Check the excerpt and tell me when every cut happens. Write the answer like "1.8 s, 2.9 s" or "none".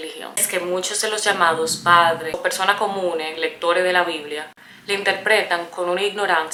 none